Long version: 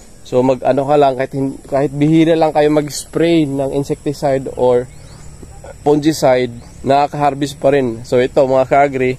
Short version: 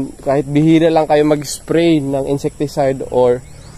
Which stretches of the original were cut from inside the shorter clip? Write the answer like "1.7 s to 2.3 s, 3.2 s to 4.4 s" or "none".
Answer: none